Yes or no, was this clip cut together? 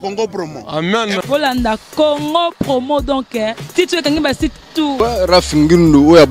yes